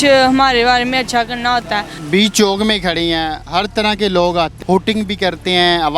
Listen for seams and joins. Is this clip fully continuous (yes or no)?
no